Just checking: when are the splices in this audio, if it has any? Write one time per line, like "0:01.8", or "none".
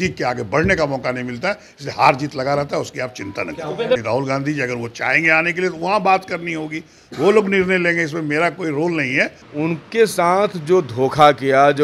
0:04.0
0:09.4